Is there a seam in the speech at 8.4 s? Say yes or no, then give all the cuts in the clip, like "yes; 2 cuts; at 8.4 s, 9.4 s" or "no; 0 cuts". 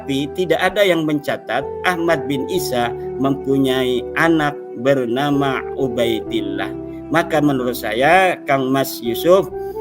no; 0 cuts